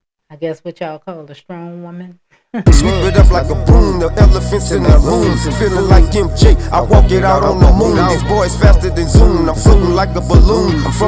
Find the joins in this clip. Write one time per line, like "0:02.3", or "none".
0:02.6